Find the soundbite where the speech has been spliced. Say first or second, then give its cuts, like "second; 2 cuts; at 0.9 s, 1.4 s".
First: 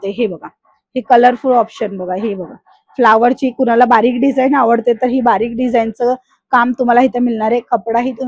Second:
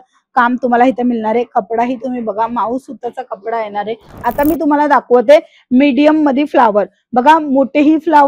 second; 1 cut; at 4.1 s